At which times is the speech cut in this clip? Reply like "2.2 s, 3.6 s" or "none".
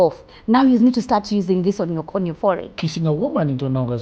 2.7 s

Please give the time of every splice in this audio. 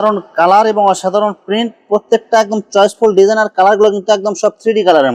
none

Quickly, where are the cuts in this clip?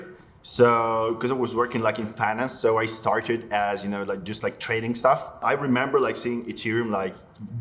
5.4 s

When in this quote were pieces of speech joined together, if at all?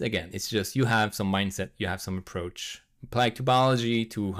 none

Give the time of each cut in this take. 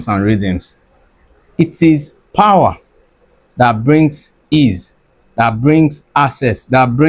none

